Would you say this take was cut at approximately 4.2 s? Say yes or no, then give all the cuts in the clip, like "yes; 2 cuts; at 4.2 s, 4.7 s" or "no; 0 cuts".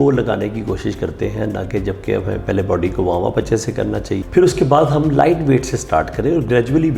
yes; 1 cut; at 4.2 s